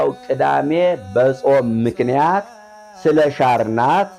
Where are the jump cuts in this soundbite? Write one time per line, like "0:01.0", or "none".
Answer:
none